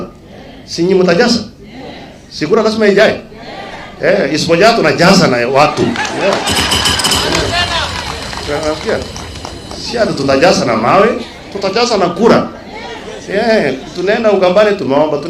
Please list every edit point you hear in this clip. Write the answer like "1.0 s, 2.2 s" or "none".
none